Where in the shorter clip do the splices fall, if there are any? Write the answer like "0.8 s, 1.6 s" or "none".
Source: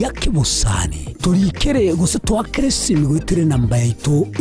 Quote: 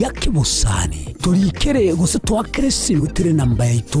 3.0 s